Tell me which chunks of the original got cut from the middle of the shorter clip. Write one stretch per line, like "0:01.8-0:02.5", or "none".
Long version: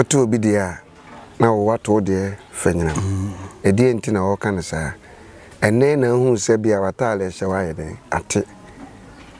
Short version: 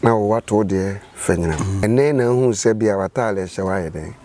0:03.2-0:05.7